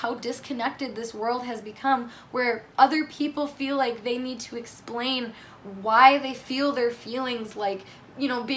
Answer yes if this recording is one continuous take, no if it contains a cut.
yes